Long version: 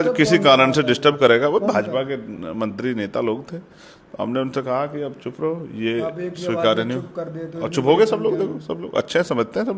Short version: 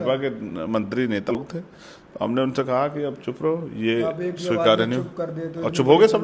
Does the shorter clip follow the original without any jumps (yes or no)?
no